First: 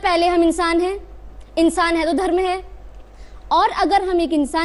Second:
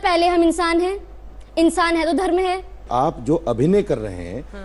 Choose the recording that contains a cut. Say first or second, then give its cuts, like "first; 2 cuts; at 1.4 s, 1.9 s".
second; 1 cut; at 2.8 s